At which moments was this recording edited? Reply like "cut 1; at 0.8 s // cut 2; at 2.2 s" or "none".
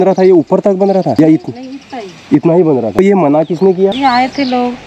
cut 1; at 1.1 s // cut 2; at 3.0 s // cut 3; at 4.0 s

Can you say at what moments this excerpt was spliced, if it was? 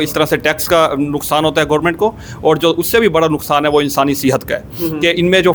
none

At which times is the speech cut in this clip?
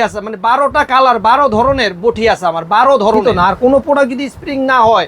cut 1; at 3.2 s

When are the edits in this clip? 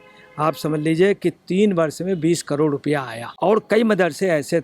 cut 1; at 3.3 s

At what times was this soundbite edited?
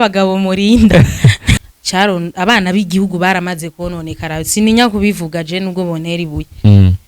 cut 1; at 1.5 s

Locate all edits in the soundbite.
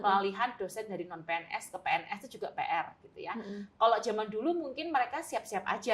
none

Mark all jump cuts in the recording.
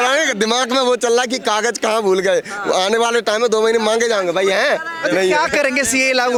none

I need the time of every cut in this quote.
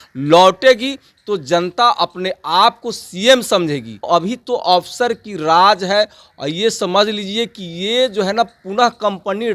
cut 1; at 4.1 s

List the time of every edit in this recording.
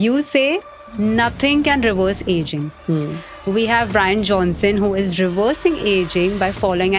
none

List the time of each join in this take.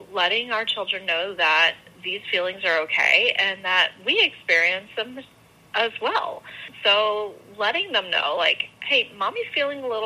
cut 1; at 6.6 s

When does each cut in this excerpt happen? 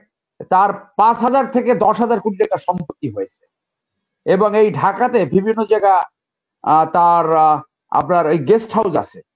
none

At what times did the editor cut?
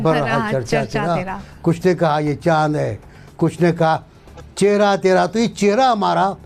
none

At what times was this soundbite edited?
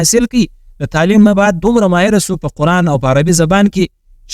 none

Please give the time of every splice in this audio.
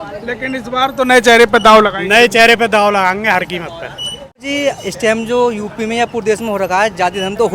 cut 1; at 4.4 s

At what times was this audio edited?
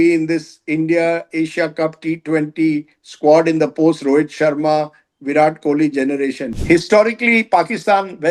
cut 1; at 6.4 s

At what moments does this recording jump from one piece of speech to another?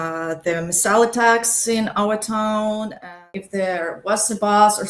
cut 1; at 3.3 s

